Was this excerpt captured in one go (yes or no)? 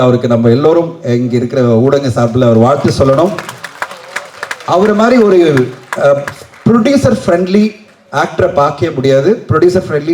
yes